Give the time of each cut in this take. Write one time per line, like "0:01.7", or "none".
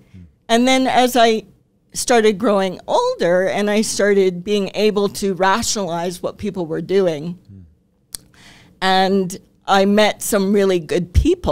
none